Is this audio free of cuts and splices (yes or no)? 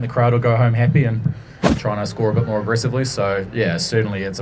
no